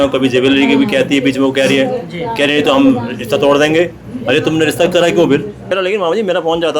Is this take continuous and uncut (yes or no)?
no